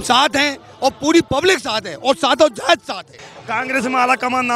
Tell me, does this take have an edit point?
yes; 1 cut; at 3.3 s

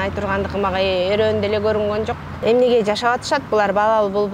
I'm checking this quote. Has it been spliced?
yes; 1 cut; at 2.2 s

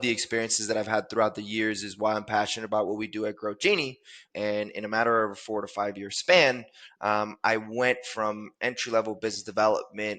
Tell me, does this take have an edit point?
yes; 1 cut; at 4.2 s

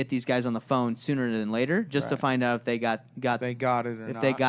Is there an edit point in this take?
no; 0 cuts

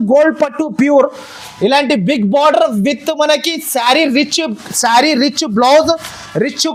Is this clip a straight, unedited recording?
yes; 0 cuts

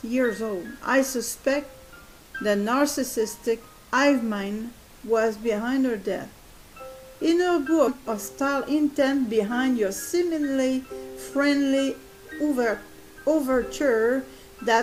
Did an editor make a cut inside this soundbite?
no; 0 cuts

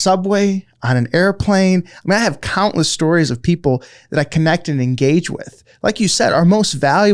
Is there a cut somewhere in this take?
no; 0 cuts

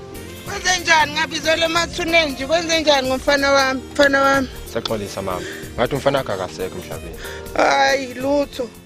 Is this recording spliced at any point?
no; 0 cuts

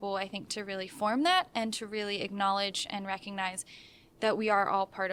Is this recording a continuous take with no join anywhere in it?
yes; 0 cuts

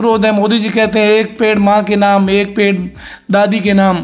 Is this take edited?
no; 0 cuts

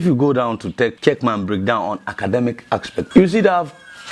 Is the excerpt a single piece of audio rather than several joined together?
no; 2 cuts; at 1.0 s, 3.1 s

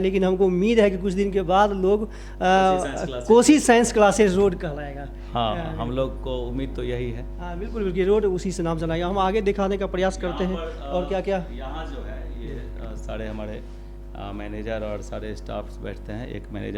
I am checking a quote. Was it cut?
no; 0 cuts

